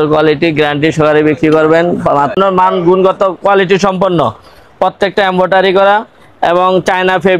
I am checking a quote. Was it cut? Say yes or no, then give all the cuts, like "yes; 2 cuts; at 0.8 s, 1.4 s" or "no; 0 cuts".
yes; 1 cut; at 2.3 s